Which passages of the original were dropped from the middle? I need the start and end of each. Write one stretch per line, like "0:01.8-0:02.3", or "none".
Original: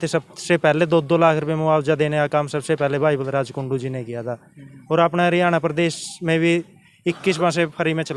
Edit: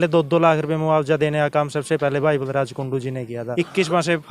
0:04.2-0:06.9